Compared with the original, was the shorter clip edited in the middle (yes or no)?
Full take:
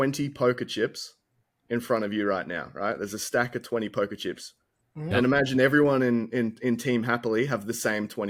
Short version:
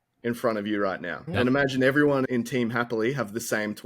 yes